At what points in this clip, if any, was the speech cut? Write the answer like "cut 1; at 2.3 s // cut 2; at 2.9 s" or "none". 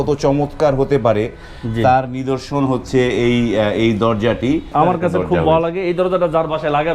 cut 1; at 4.7 s